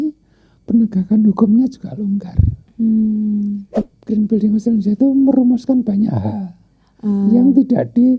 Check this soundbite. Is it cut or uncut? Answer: cut